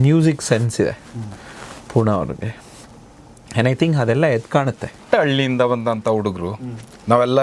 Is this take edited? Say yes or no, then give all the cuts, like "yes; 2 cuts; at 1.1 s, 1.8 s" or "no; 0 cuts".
yes; 1 cut; at 5.0 s